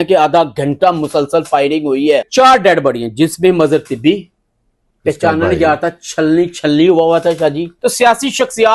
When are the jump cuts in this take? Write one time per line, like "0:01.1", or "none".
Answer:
0:02.3
0:07.7